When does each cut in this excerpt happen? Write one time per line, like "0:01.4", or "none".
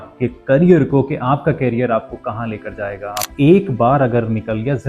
0:03.2